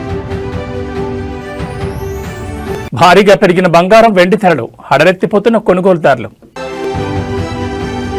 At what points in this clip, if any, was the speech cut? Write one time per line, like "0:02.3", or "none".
0:02.7
0:06.7